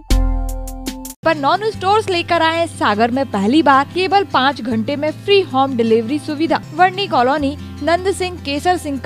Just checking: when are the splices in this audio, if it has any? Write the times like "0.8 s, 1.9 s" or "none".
1.2 s, 3.9 s, 6.7 s